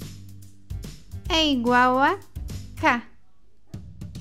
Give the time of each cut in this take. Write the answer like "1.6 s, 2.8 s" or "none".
1.3 s

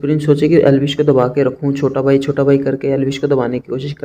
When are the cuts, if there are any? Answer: none

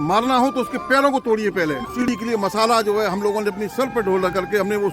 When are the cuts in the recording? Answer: 2.2 s

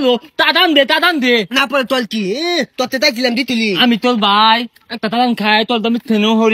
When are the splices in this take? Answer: none

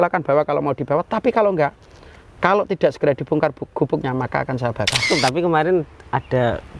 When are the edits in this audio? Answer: 5.0 s

